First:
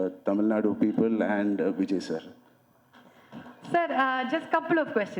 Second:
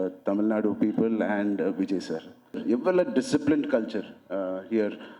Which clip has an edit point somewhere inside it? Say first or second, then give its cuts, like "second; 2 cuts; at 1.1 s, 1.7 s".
second; 1 cut; at 2.6 s